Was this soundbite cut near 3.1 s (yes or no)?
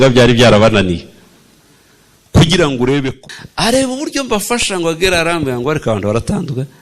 yes